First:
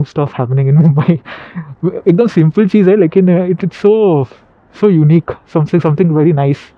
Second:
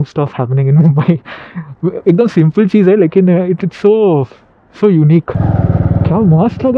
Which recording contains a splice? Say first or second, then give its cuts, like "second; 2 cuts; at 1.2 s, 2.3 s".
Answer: second; 1 cut; at 5.4 s